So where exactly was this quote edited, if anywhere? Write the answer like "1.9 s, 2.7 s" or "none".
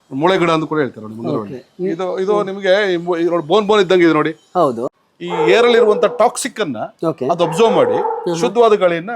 4.9 s